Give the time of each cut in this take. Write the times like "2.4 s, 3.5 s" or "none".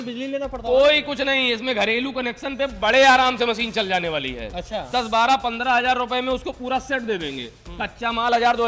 4.9 s

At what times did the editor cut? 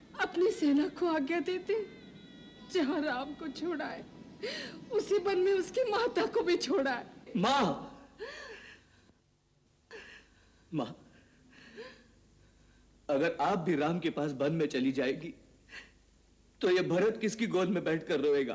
none

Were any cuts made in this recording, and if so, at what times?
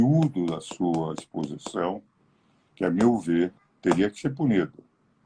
none

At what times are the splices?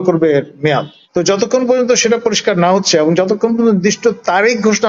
1.0 s

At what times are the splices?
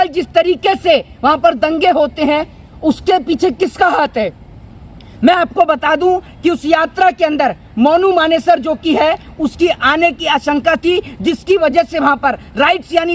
none

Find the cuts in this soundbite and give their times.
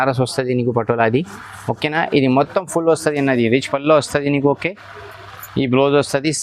none

